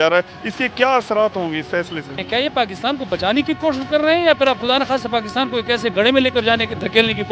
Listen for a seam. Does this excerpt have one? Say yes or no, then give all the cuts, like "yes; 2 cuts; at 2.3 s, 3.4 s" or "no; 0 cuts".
yes; 1 cut; at 2.2 s